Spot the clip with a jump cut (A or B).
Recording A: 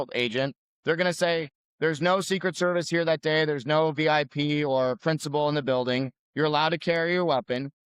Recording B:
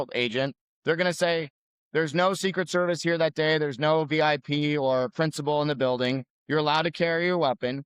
A